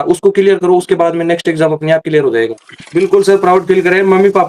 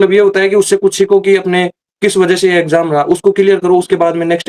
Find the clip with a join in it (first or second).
first